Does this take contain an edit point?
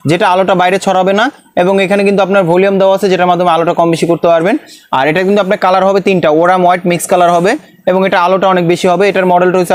no; 0 cuts

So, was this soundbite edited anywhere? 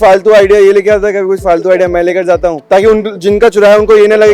yes; 1 cut; at 2.6 s

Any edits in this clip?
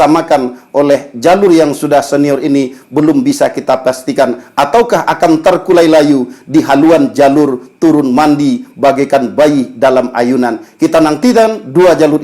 no; 0 cuts

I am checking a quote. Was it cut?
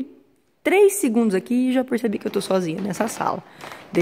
no; 0 cuts

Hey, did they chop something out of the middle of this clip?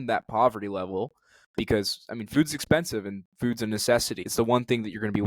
yes; 1 cut; at 4.2 s

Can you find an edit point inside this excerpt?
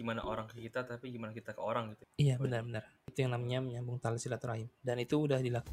yes; 2 cuts; at 2.0 s, 3.1 s

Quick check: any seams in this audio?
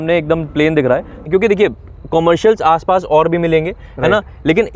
yes; 1 cut; at 1.2 s

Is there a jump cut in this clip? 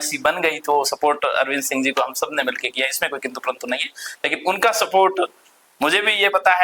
no; 0 cuts

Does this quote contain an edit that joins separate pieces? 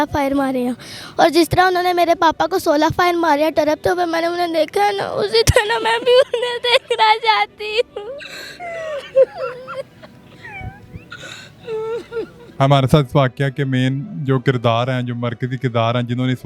no; 0 cuts

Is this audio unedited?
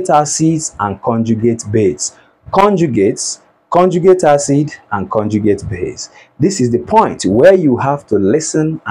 yes; 0 cuts

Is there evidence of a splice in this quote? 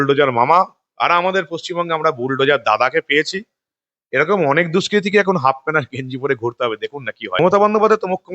yes; 1 cut; at 7.4 s

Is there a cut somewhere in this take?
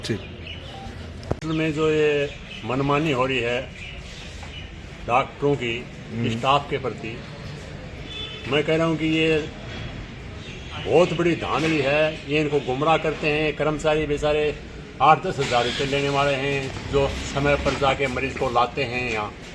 yes; 1 cut; at 1.4 s

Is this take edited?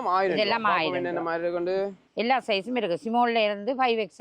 yes; 1 cut; at 2.0 s

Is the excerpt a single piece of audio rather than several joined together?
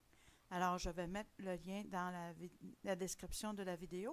yes; 0 cuts

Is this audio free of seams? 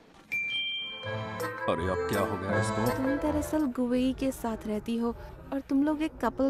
no; 2 cuts; at 1.0 s, 3.0 s

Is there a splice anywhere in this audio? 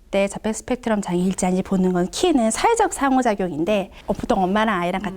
yes; 1 cut; at 3.9 s

